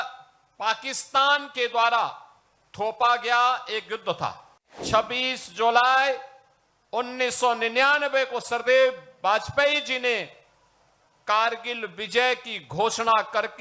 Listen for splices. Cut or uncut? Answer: cut